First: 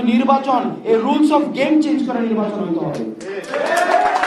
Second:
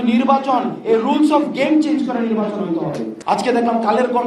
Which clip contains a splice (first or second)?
second